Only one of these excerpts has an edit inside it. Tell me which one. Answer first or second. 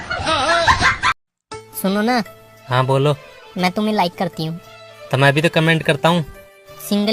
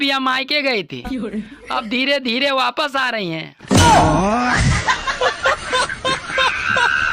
first